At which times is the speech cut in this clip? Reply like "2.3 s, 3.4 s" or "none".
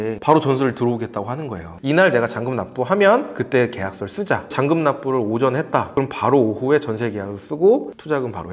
1.7 s, 4.5 s